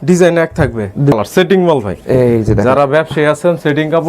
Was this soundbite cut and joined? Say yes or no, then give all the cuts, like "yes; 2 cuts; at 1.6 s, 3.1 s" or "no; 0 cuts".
yes; 1 cut; at 1.1 s